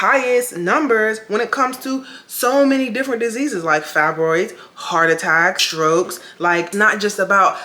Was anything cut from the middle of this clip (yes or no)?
yes